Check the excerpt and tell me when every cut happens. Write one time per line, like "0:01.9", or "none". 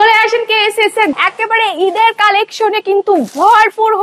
0:01.1